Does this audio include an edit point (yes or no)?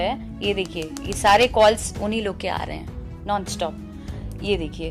no